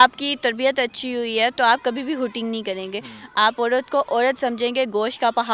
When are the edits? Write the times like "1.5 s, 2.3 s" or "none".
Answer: none